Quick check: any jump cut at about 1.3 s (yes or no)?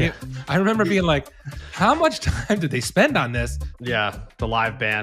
no